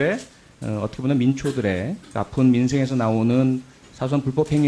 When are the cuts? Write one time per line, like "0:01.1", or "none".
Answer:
0:01.4